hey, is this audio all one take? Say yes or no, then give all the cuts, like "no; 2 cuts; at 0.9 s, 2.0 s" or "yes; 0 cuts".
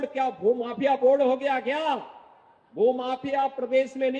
yes; 0 cuts